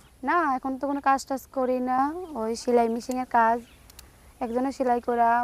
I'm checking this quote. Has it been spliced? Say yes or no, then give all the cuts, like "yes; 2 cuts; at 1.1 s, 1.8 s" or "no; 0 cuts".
no; 0 cuts